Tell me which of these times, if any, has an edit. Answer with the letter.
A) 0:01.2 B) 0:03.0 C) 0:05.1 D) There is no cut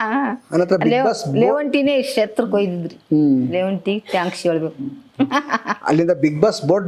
D